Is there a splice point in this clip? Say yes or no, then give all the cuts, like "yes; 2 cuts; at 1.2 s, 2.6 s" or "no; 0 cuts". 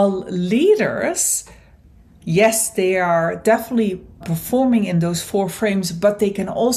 yes; 1 cut; at 4.2 s